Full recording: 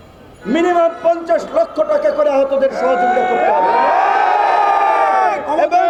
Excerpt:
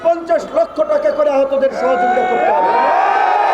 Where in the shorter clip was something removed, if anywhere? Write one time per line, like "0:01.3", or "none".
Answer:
none